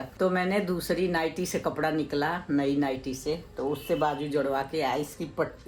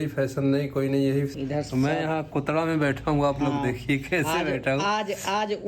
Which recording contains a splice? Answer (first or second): second